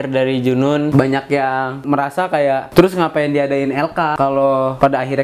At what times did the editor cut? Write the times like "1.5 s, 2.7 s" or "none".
0.9 s, 2.2 s, 4.5 s